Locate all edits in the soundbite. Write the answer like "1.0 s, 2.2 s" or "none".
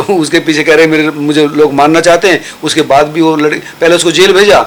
none